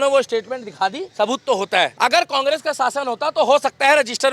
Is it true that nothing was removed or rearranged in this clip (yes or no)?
no